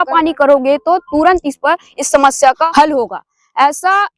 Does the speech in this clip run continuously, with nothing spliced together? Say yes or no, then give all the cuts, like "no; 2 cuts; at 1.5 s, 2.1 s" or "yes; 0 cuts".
no; 1 cut; at 2.6 s